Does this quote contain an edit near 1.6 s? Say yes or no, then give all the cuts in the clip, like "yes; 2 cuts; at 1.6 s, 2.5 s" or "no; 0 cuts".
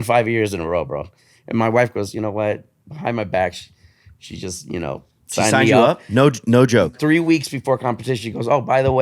no; 1 cut; at 6.9 s